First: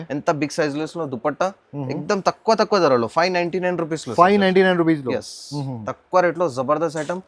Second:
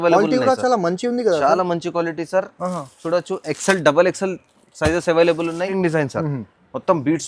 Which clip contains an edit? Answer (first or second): second